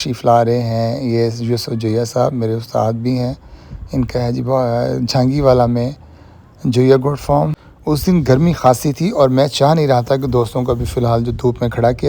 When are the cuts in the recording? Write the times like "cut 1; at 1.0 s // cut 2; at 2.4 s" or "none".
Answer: cut 1; at 7.7 s